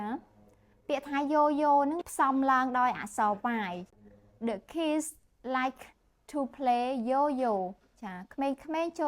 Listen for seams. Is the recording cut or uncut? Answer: cut